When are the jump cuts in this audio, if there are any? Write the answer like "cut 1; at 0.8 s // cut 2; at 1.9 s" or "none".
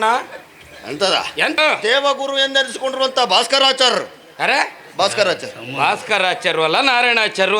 cut 1; at 1.6 s